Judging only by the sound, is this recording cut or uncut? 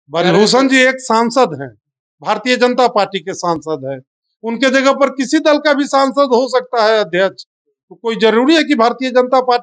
uncut